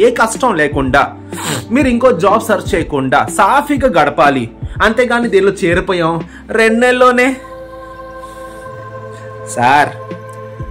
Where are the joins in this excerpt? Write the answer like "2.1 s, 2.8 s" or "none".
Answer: none